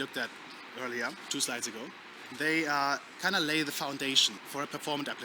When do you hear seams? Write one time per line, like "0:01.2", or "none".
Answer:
0:01.2
0:04.4